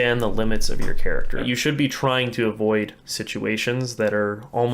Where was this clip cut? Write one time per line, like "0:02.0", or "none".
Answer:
0:01.4